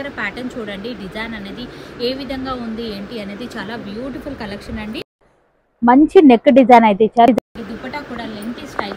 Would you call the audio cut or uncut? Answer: uncut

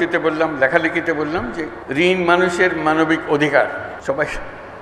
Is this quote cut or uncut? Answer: cut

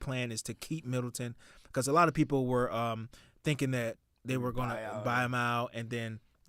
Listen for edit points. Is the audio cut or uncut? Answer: uncut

